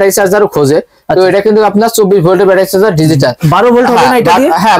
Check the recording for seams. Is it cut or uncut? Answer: uncut